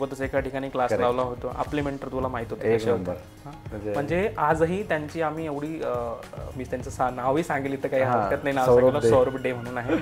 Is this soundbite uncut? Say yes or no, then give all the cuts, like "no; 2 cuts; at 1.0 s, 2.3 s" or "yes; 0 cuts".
yes; 0 cuts